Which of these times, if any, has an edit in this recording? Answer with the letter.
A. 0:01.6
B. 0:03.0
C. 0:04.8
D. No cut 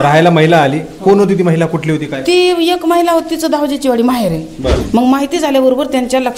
C